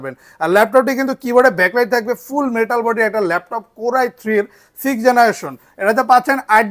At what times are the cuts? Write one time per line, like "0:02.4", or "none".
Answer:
none